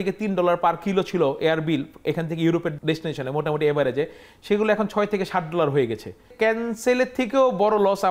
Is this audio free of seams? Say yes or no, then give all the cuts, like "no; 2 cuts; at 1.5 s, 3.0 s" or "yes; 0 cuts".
no; 1 cut; at 2.7 s